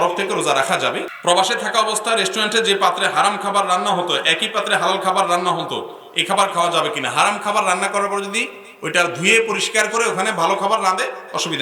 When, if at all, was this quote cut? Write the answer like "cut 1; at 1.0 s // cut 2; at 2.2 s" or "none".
cut 1; at 1.1 s